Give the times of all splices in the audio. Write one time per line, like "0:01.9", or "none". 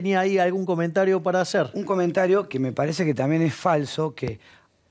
none